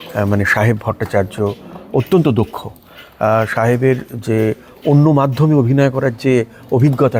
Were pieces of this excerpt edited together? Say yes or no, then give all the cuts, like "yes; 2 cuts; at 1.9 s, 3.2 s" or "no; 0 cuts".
no; 0 cuts